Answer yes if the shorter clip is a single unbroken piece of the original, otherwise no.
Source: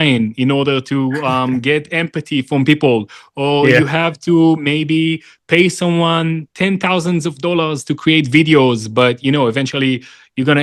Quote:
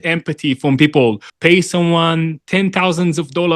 no